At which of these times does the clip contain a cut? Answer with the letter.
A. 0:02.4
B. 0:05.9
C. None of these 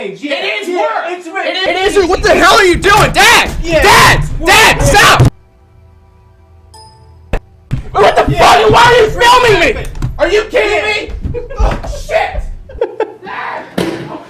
C